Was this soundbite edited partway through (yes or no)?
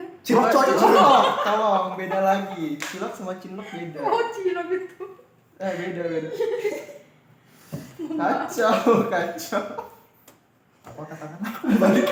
no